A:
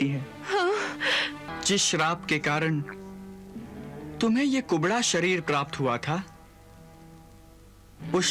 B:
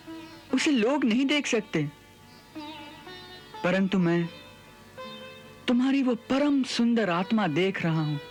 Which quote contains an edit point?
A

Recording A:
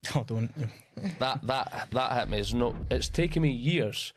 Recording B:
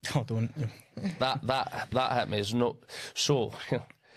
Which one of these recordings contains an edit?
A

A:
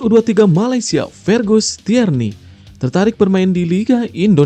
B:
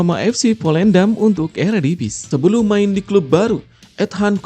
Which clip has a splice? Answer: B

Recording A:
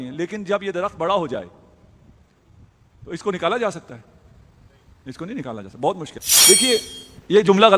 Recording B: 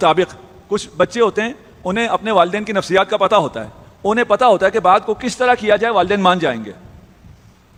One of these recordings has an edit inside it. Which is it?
A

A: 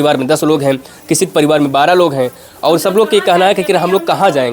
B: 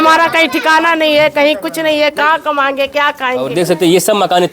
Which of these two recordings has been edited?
B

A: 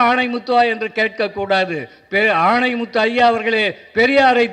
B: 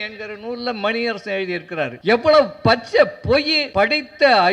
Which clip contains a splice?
B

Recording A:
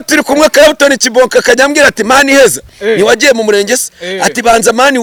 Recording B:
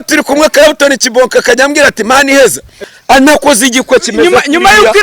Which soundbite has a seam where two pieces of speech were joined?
B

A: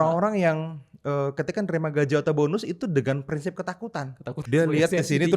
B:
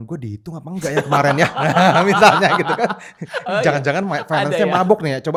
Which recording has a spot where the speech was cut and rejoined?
A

